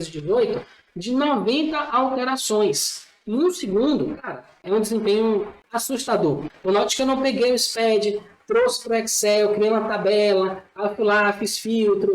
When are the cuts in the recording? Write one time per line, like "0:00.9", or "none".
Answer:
0:04.6
0:05.6
0:06.5